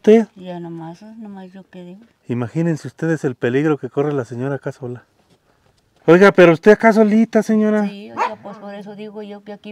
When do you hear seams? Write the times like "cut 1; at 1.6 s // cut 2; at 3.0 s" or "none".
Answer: cut 1; at 2.1 s // cut 2; at 5.9 s